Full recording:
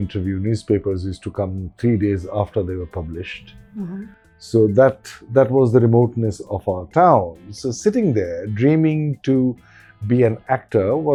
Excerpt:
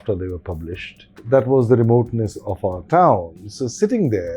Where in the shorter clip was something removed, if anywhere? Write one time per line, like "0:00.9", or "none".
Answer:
0:01.1